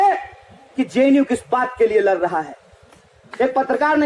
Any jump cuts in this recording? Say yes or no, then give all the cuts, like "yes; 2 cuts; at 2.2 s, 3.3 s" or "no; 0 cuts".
no; 0 cuts